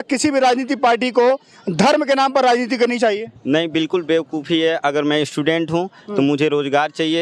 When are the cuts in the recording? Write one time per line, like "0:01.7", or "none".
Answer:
none